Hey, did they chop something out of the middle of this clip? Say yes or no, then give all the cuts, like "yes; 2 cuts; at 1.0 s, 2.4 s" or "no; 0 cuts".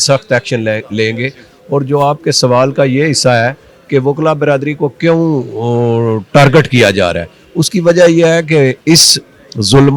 no; 0 cuts